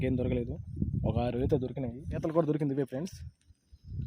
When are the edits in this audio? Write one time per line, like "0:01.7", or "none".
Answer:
0:02.1